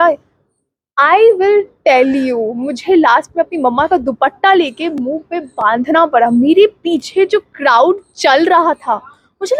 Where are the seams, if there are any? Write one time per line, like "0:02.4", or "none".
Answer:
none